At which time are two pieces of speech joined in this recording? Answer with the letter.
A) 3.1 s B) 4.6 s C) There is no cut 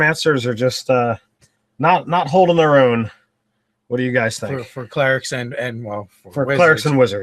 A